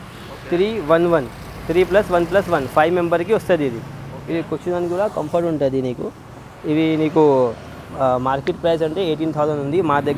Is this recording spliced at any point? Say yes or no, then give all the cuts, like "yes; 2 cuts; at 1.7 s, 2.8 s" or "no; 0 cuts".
no; 0 cuts